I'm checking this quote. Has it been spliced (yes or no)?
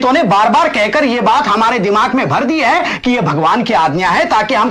no